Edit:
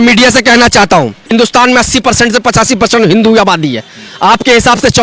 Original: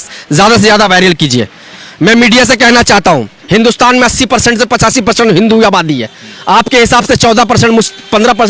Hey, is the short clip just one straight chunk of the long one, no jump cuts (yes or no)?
no